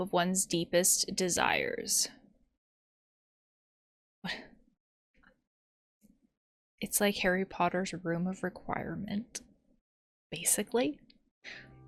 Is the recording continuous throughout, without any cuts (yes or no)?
yes